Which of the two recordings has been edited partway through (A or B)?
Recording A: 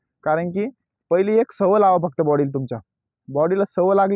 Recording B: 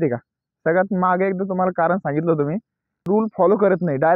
B